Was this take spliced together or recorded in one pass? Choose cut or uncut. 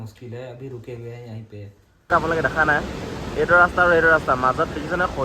cut